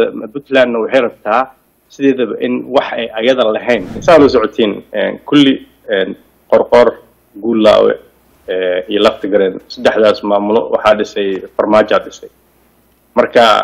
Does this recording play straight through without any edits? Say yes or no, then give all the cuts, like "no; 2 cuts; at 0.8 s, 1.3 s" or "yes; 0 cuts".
no; 1 cut; at 4.0 s